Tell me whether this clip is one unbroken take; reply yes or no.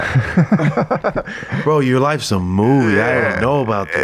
no